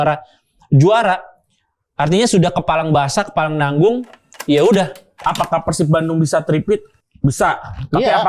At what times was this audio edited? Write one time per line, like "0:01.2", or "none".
0:05.1